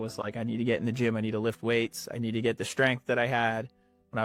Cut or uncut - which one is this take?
uncut